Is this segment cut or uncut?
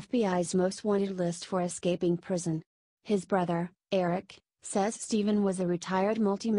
uncut